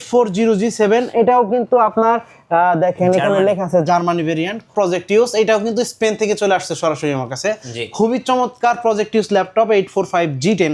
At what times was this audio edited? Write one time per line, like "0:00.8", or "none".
0:04.7